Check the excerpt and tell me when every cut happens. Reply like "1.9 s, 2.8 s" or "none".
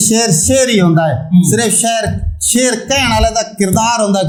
none